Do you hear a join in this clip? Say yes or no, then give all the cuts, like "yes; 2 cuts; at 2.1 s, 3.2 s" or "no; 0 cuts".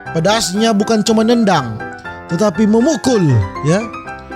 no; 0 cuts